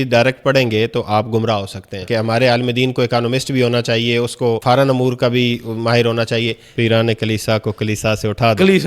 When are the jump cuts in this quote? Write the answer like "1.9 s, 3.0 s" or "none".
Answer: 2.0 s, 4.6 s, 6.6 s